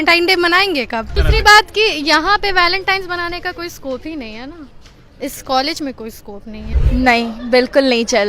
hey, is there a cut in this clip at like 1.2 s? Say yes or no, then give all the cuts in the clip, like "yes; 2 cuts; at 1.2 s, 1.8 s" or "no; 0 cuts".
yes; 2 cuts; at 1.2 s, 6.7 s